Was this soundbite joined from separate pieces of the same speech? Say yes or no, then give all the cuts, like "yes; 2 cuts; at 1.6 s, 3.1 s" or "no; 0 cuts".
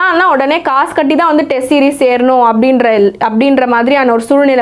no; 0 cuts